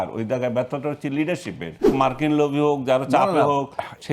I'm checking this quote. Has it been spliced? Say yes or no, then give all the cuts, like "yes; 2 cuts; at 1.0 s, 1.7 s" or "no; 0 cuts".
yes; 1 cut; at 1.9 s